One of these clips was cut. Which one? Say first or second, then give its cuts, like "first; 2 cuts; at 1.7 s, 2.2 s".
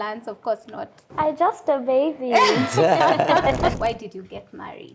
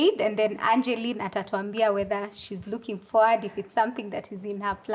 first; 2 cuts; at 1.0 s, 3.8 s